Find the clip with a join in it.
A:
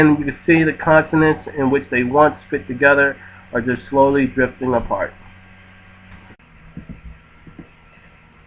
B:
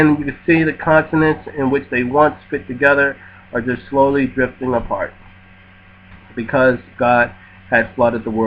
B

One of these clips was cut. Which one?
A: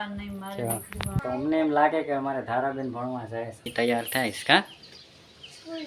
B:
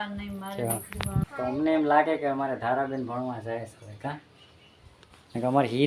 A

